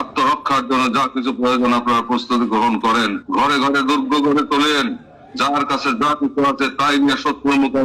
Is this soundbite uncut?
no; 1 cut; at 3.2 s

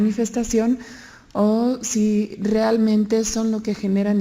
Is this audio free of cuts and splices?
no; 1 cut; at 1.9 s

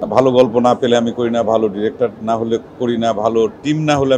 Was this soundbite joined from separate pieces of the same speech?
no; 0 cuts

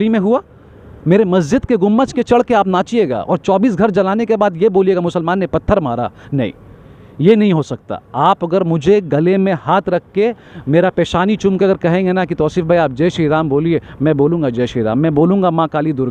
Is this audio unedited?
yes; 0 cuts

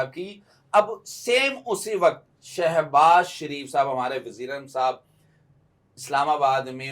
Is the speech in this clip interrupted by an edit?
no; 0 cuts

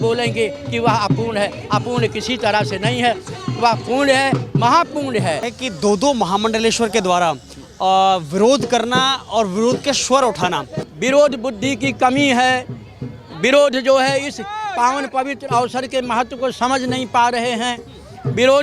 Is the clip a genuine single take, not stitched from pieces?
no; 2 cuts; at 5.5 s, 10.8 s

